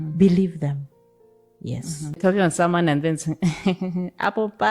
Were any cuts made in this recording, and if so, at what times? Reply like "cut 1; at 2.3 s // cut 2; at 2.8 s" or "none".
cut 1; at 2.2 s